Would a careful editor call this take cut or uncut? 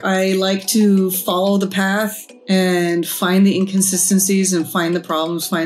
uncut